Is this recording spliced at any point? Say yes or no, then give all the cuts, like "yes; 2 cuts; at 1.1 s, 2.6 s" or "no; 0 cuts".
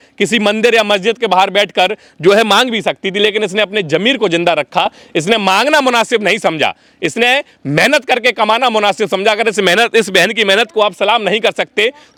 no; 0 cuts